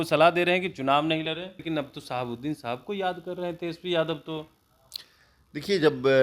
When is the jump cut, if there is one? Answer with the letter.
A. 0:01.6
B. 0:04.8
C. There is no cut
A